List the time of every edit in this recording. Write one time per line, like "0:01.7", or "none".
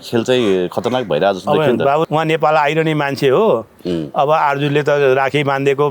0:02.0